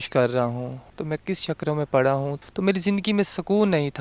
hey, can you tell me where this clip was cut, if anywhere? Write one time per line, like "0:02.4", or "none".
0:02.5

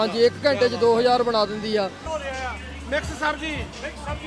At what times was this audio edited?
0:02.1

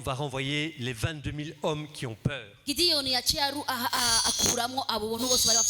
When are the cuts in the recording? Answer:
none

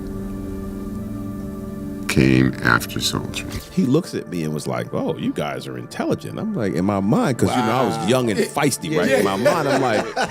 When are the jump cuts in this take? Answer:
0:03.6

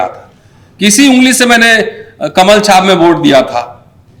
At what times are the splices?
none

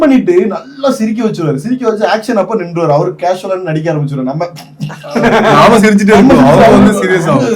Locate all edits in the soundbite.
none

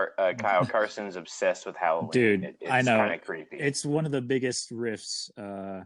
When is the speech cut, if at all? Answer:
none

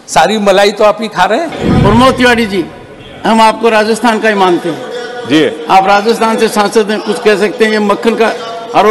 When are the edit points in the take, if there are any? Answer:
0:01.6

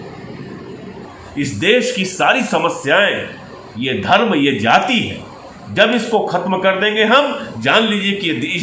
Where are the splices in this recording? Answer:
0:01.1

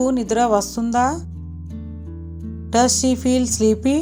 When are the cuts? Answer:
none

